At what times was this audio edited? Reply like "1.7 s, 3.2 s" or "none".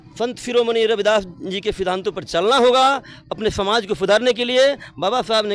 none